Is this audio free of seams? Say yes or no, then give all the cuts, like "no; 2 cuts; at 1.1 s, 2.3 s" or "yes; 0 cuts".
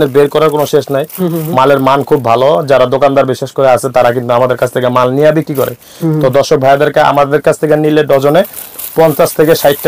yes; 0 cuts